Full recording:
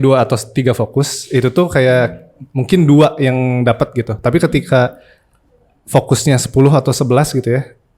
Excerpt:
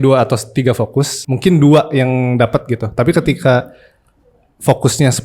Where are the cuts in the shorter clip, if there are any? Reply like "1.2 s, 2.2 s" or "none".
1.2 s